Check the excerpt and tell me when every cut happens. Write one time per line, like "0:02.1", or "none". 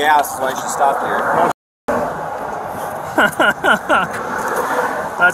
none